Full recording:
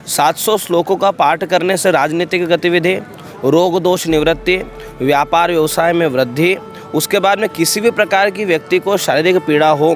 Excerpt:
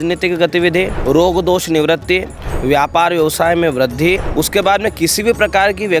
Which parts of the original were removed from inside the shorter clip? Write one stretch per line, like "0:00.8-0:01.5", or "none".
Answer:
0:03.0-0:03.3
0:06.6-0:06.8